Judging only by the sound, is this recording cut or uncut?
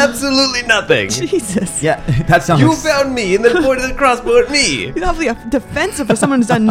cut